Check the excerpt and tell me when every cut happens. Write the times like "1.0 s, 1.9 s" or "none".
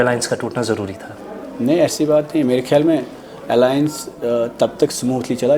none